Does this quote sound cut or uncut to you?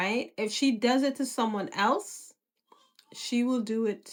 uncut